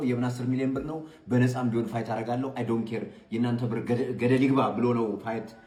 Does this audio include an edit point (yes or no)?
no